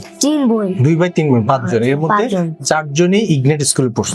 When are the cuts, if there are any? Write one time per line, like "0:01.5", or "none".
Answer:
none